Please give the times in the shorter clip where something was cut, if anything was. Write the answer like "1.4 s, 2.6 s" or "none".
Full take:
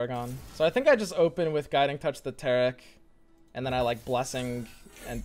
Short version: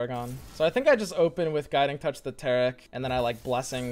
2.9 s

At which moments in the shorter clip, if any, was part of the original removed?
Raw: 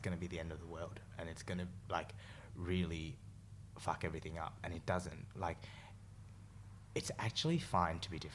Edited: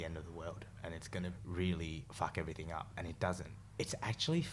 1.4 s, 2.0 s, 3.6 s

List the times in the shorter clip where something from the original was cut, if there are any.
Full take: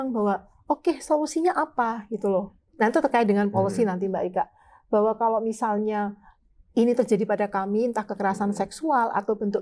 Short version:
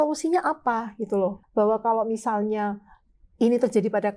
1.4 s

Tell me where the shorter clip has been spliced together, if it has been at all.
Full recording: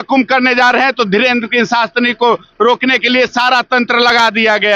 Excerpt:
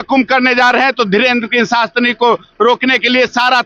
none

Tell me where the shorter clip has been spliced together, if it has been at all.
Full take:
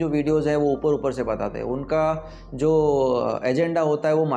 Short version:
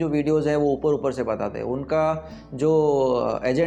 none

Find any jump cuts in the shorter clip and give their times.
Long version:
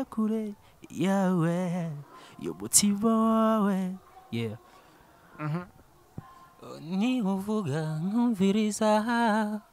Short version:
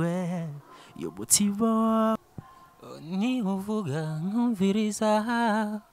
2.1 s

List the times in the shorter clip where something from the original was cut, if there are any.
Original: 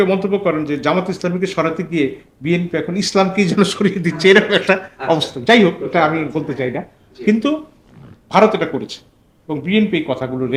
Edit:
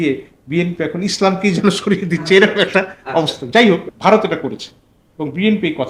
3.9 s

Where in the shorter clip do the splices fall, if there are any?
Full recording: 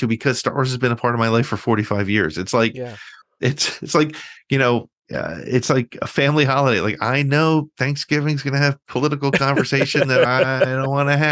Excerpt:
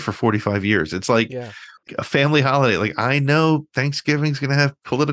1.9 s

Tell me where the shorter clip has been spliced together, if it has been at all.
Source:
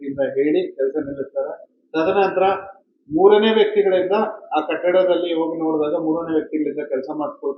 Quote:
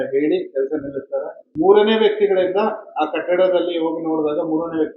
1.4 s

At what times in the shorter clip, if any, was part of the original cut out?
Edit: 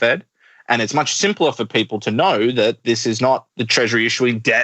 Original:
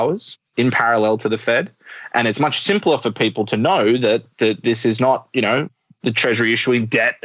3.1 s

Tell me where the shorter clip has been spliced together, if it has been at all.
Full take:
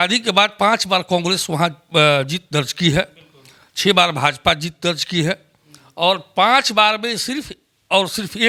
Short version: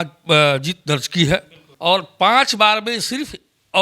2.1 s

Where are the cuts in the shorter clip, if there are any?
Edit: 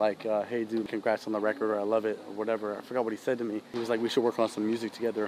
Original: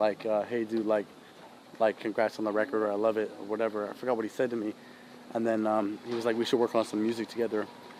0.8 s, 3.7 s

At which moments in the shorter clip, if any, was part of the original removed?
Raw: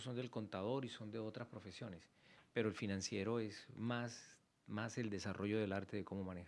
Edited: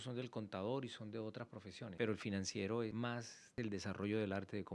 1.8 s, 3.1 s

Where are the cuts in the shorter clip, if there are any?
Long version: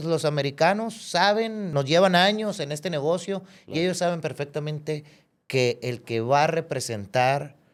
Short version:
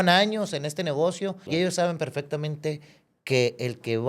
1.4 s

